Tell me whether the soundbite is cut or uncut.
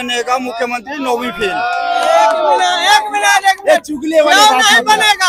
uncut